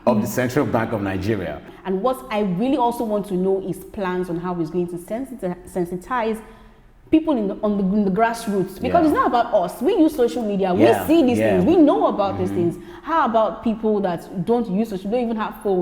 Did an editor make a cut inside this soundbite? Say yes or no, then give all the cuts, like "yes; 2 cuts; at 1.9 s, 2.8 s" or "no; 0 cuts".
yes; 1 cut; at 1.6 s